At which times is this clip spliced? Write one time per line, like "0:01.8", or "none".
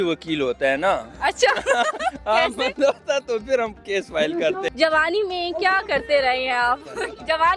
0:04.6

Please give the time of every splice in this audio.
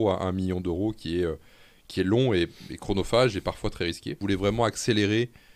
0:04.1

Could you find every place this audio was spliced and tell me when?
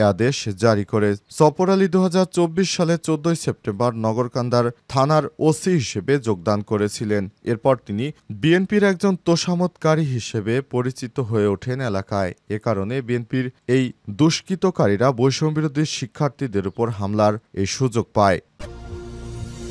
0:18.5

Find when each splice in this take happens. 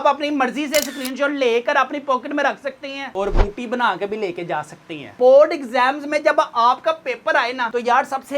0:05.1

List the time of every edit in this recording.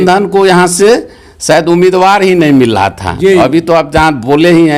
none

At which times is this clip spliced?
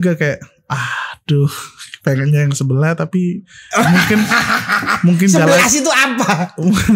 none

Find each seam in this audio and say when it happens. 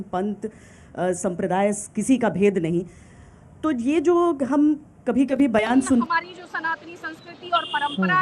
0:06.0

